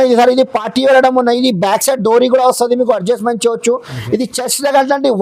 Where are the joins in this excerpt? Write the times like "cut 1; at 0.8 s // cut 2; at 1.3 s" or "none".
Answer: none